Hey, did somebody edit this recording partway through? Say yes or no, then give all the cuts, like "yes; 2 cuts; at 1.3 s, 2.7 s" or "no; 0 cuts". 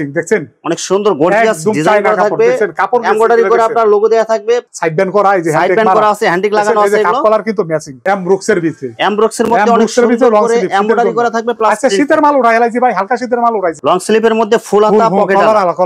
yes; 3 cuts; at 4.7 s, 7.9 s, 13.8 s